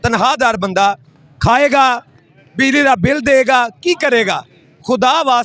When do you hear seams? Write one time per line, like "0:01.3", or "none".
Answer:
none